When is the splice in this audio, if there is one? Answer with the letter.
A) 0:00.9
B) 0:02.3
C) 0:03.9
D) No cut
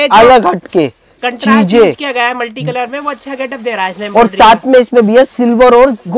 D